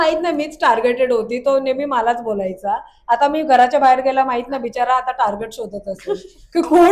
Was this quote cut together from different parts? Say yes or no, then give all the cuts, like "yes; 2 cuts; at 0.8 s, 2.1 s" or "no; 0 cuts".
no; 0 cuts